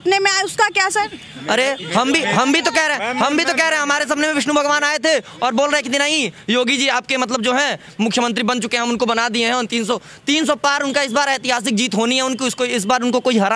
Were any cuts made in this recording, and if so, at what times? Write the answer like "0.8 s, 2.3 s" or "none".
none